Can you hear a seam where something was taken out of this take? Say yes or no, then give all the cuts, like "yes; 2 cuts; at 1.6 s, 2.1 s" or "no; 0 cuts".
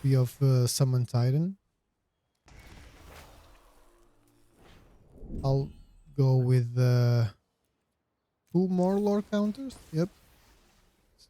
yes; 1 cut; at 5.4 s